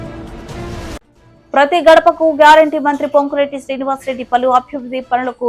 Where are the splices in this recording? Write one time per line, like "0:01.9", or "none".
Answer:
0:01.0

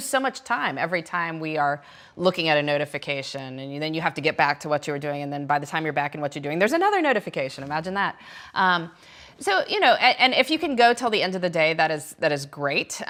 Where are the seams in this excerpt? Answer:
none

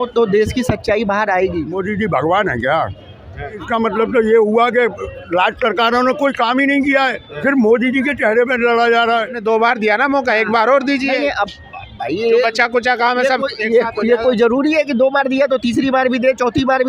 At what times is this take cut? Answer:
0:01.8
0:03.6
0:09.3

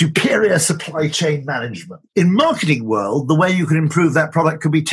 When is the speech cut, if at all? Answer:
0:02.0

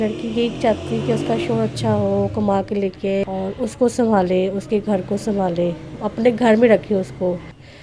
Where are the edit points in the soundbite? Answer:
0:03.2

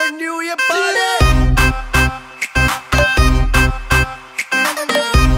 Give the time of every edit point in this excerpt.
0:01.2

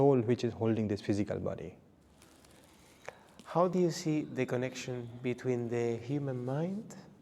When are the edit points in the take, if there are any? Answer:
none

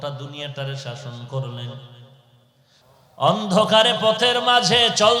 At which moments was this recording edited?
0:02.8

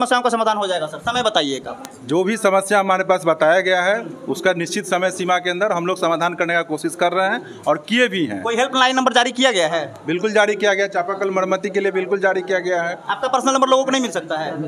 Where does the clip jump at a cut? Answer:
none

